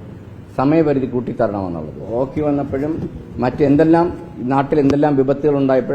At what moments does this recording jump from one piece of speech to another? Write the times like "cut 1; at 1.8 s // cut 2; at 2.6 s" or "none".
cut 1; at 2.1 s

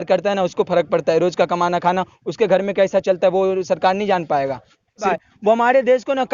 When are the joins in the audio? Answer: cut 1; at 5.1 s

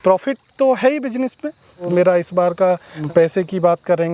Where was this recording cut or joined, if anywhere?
cut 1; at 1.9 s // cut 2; at 2.9 s

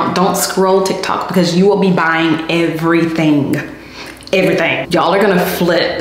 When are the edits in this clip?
cut 1; at 4.8 s

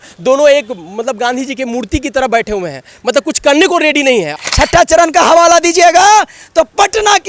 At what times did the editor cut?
cut 1; at 4.4 s

